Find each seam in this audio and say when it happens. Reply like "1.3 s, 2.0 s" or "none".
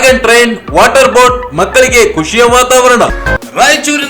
3.2 s